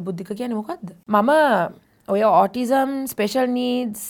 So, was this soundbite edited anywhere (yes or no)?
yes